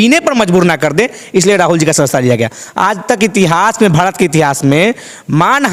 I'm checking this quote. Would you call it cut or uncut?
uncut